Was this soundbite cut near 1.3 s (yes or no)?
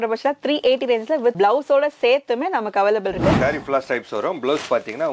yes